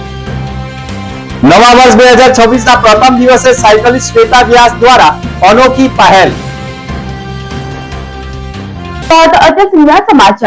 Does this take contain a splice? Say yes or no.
no